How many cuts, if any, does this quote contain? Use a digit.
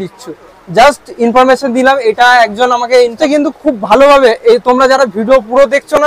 1